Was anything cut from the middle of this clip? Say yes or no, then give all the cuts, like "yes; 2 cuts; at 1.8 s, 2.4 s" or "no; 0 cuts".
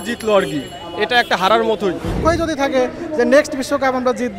yes; 1 cut; at 2.2 s